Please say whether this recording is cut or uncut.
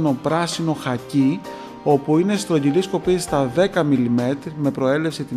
uncut